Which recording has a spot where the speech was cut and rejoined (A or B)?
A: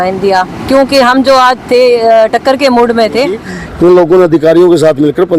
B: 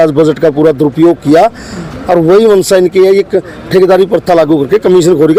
A